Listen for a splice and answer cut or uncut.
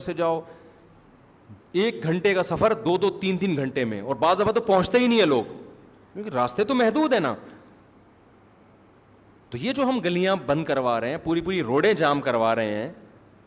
uncut